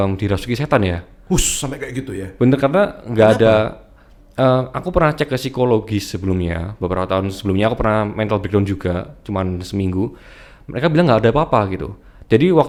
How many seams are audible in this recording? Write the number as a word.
zero